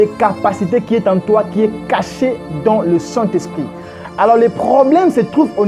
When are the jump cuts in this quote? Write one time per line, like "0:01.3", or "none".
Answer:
none